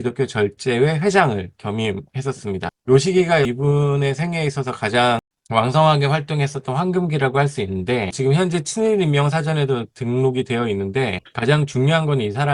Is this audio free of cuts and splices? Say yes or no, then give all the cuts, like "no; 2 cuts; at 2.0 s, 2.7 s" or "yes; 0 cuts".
no; 4 cuts; at 2.7 s, 3.5 s, 5.3 s, 8.1 s